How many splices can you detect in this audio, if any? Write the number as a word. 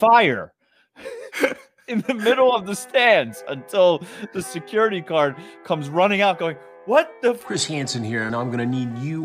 one